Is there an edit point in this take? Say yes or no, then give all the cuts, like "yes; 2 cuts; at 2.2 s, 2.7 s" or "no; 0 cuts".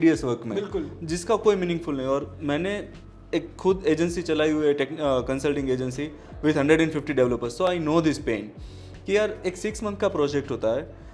no; 0 cuts